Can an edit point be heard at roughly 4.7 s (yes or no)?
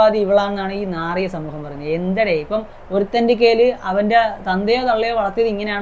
no